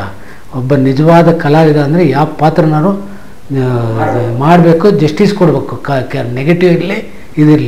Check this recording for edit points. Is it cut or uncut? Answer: uncut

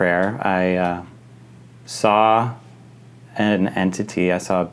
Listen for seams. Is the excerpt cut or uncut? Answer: uncut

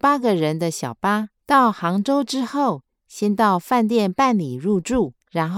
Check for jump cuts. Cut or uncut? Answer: uncut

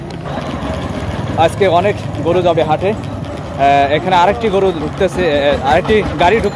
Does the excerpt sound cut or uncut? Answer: uncut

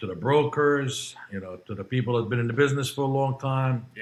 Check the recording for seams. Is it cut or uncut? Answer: uncut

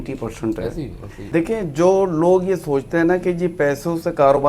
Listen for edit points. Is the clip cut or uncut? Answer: cut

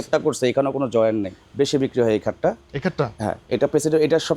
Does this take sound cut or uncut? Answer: cut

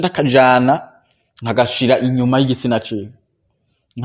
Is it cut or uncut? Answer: uncut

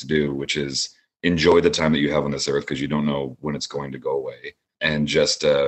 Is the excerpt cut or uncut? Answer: uncut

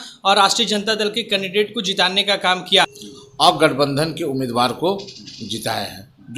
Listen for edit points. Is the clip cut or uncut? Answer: cut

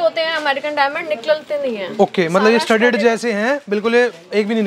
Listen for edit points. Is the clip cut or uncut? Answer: uncut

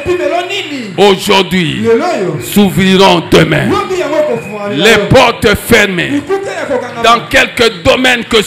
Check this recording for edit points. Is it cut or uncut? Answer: uncut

